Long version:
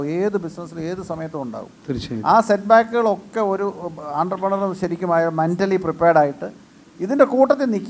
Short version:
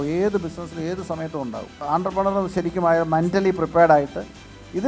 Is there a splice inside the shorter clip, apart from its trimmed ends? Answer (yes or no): yes